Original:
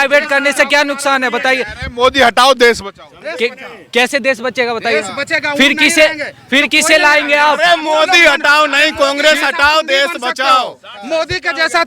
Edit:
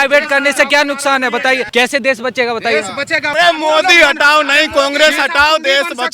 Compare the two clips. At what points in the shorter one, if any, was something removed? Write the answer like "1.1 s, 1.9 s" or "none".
1.6 s, 3.3 s